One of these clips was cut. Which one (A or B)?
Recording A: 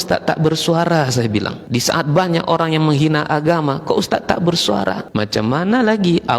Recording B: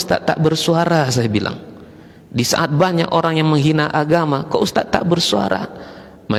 A